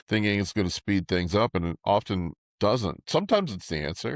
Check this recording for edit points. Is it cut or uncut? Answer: cut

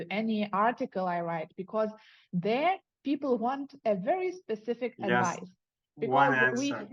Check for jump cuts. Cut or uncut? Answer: uncut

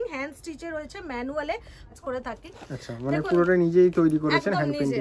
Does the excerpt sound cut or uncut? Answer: cut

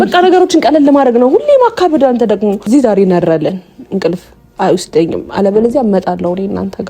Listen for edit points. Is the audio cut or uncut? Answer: cut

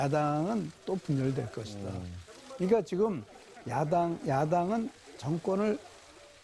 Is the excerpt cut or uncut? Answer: cut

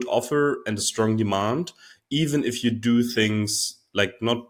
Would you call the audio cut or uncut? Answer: uncut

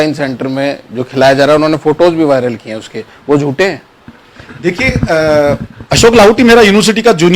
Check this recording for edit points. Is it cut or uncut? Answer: uncut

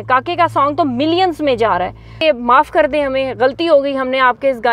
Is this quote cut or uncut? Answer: cut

